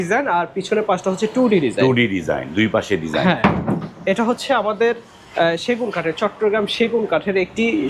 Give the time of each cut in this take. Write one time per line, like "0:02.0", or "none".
none